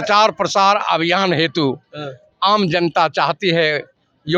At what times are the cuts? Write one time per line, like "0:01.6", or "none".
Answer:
none